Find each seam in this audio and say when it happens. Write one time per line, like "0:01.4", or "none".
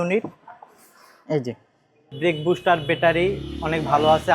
0:02.1